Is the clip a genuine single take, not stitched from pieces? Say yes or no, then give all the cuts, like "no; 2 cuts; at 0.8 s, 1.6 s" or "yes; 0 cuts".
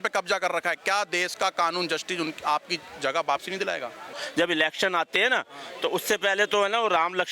no; 1 cut; at 4.2 s